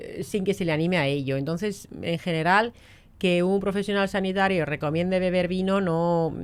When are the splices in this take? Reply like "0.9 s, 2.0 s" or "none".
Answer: none